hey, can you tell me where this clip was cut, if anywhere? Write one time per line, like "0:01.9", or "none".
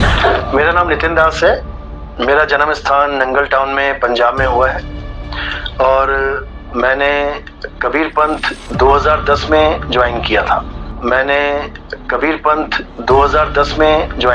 0:10.7